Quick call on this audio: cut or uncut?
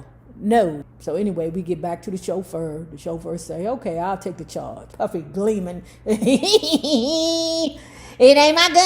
cut